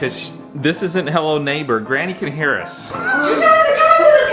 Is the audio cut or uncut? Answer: uncut